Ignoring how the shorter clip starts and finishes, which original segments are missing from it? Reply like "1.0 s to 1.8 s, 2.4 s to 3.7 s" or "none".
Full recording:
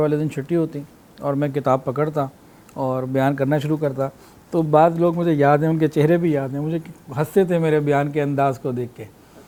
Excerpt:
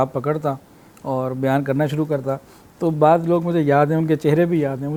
none